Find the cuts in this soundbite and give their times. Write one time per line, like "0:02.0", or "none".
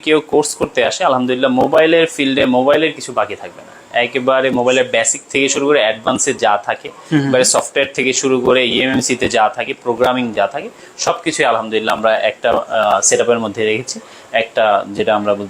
none